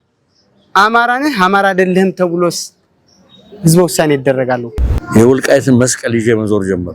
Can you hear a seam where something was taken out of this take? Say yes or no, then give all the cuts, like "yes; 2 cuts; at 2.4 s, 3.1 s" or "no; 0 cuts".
yes; 1 cut; at 4.7 s